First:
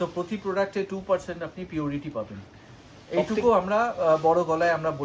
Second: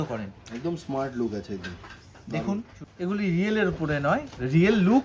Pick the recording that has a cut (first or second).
second